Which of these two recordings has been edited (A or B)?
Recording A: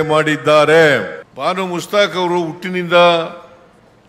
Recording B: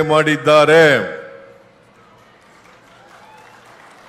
A